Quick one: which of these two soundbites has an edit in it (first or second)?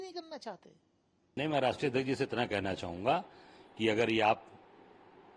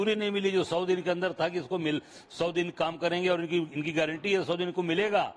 first